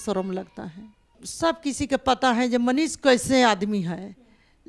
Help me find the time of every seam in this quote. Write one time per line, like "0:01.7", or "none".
0:01.2

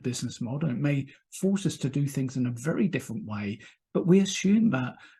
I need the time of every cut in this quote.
0:03.7

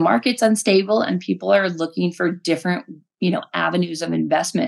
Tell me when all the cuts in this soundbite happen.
none

